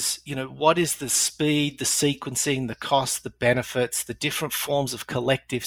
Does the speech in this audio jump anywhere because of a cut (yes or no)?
no